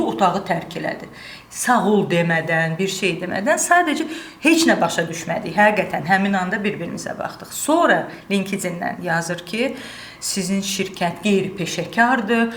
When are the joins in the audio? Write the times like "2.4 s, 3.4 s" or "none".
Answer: none